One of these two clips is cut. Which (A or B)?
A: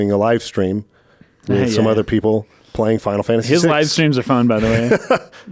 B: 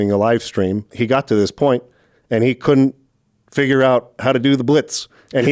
B